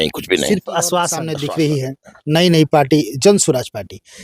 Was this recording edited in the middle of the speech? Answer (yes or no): yes